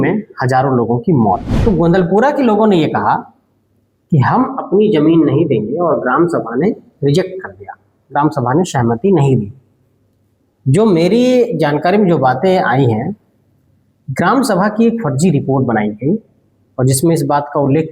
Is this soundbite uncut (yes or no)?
no